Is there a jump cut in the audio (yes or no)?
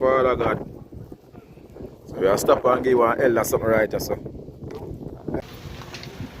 yes